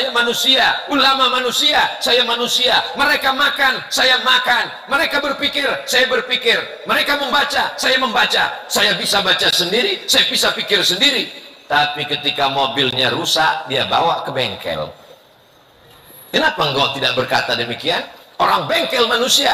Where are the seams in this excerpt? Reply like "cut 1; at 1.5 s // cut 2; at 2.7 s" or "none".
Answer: none